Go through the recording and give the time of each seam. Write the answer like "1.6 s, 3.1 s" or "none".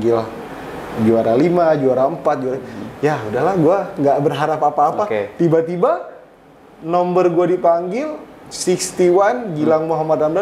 none